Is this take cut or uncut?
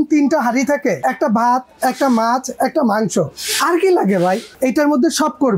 cut